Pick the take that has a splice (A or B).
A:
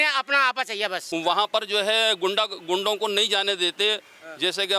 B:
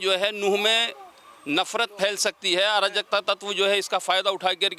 A